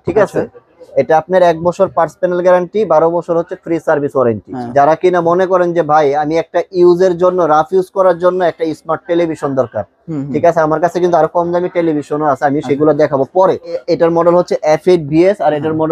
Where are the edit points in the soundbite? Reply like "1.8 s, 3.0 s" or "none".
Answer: 4.5 s, 13.8 s